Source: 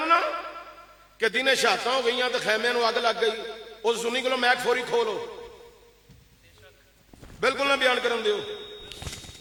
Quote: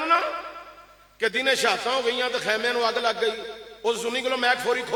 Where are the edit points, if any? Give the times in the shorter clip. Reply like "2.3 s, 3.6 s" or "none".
none